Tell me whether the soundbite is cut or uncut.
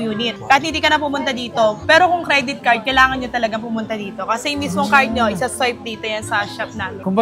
uncut